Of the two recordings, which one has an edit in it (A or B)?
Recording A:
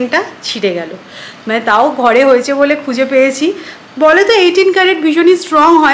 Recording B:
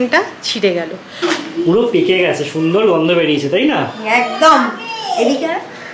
B